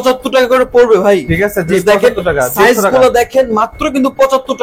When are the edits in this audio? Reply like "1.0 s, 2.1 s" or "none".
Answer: none